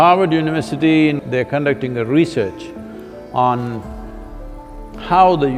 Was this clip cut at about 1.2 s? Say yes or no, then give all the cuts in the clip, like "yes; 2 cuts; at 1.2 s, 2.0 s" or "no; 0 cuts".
yes; 1 cut; at 1.2 s